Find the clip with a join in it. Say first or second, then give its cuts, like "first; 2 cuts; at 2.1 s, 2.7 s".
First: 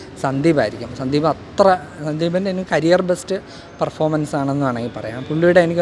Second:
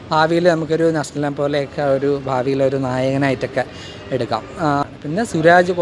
second; 1 cut; at 4.8 s